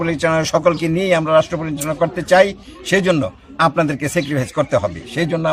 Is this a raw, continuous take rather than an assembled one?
yes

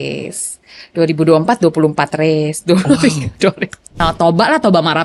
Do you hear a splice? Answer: yes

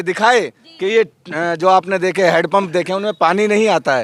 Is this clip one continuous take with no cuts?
yes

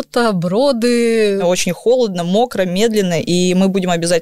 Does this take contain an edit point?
yes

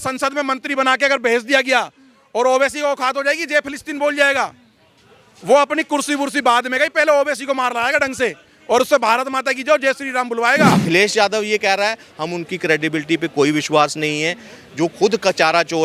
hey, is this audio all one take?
no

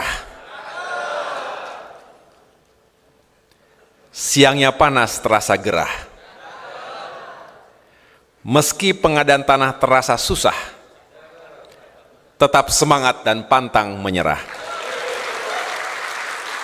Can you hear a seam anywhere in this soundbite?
no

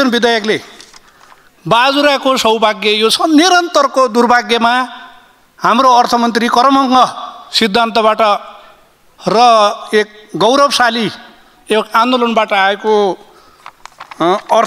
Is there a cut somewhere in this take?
no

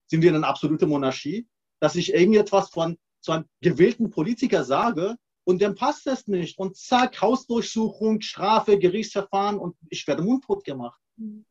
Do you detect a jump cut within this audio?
no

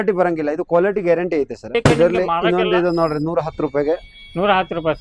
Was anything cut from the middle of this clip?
yes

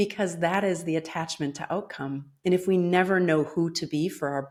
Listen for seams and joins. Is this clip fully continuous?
yes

